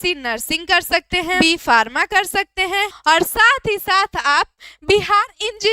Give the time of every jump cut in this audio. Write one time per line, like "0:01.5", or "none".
0:01.4
0:03.0